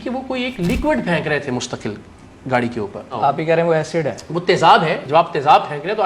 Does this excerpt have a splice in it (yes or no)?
yes